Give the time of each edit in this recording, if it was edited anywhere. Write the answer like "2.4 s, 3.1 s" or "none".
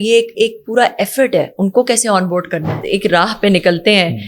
2.7 s